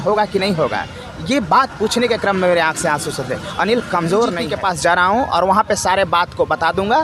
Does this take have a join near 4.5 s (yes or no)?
yes